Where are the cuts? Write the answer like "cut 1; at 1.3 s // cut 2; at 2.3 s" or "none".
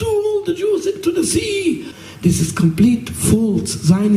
cut 1; at 1.9 s